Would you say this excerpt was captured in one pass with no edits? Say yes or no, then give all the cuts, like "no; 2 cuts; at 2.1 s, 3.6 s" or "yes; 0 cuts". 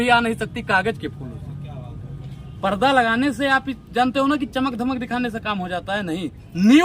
yes; 0 cuts